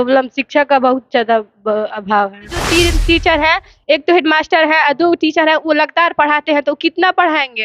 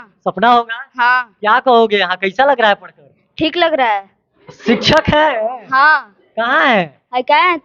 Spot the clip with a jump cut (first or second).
first